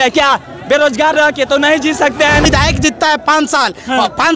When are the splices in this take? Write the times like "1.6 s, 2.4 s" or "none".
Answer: 2.4 s